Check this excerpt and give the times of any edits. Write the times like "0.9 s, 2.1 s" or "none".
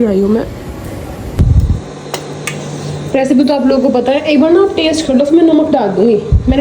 1.4 s